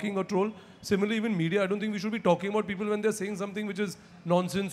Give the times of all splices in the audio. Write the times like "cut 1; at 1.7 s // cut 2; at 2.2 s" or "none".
none